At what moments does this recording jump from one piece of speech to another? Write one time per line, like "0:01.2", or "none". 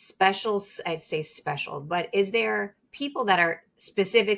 none